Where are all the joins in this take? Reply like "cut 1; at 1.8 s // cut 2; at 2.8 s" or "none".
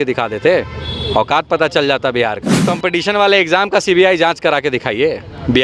cut 1; at 2.6 s